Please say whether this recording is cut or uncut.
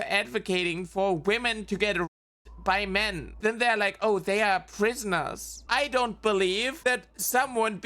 cut